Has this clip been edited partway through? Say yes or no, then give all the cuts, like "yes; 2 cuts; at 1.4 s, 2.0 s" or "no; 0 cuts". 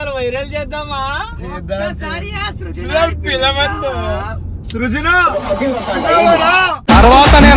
no; 0 cuts